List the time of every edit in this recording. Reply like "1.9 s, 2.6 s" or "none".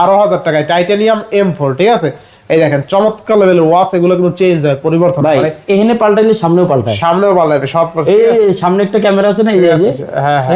none